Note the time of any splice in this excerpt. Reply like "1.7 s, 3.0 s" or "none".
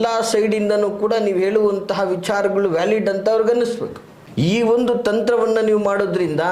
4.5 s